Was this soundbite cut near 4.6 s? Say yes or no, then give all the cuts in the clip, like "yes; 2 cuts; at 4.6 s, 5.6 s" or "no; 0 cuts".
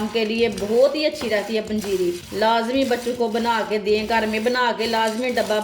no; 1 cut; at 2.3 s